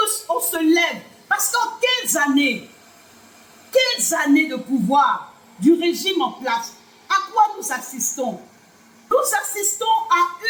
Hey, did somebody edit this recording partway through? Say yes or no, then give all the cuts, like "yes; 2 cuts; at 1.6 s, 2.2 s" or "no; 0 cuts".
yes; 1 cut; at 9.1 s